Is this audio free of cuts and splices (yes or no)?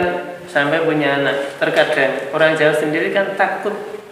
yes